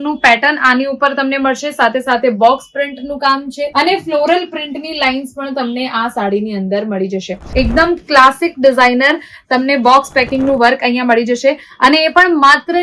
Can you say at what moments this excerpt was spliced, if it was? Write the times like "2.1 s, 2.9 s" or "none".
7.4 s